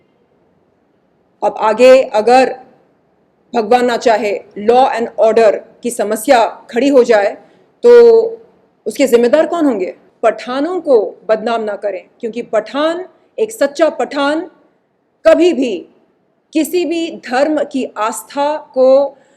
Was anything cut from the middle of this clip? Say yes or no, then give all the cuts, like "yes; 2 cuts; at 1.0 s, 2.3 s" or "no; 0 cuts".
yes; 1 cut; at 10.0 s